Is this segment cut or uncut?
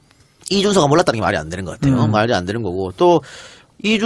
uncut